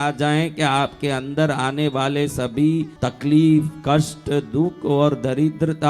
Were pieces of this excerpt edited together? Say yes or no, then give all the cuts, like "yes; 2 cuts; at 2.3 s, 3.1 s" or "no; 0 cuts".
yes; 1 cut; at 3.0 s